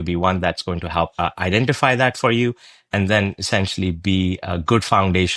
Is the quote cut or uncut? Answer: cut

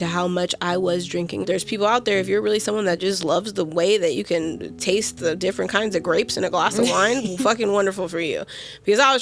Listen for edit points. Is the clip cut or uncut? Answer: cut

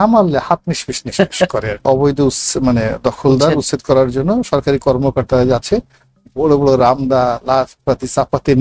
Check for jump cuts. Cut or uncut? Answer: cut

